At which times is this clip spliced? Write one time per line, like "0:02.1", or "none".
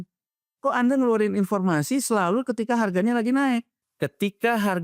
0:03.8